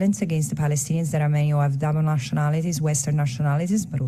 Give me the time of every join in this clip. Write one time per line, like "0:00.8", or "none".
none